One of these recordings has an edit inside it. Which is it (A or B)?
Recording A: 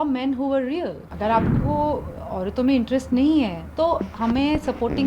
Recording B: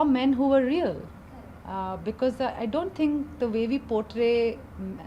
A